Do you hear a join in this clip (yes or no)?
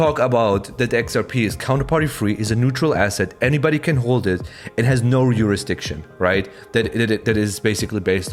no